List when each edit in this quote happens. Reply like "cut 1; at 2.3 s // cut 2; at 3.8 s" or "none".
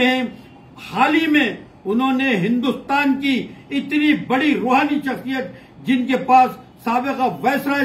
none

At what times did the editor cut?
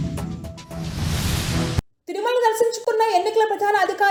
none

